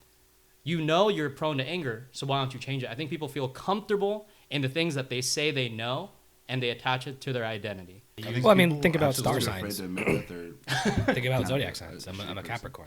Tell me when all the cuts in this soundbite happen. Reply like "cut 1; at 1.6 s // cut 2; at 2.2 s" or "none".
cut 1; at 8.2 s